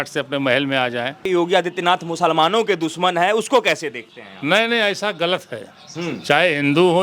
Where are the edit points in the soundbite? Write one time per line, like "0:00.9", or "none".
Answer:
0:01.3